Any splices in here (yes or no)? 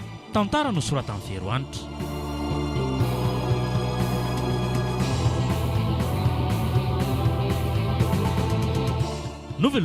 yes